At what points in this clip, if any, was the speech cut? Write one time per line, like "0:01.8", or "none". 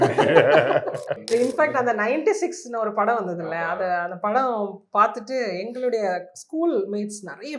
0:01.2